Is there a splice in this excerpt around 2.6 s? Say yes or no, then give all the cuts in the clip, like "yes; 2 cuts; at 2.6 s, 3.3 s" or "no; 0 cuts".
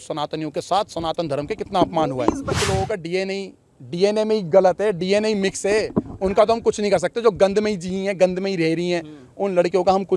yes; 1 cut; at 2.6 s